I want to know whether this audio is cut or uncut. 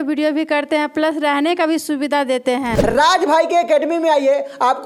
cut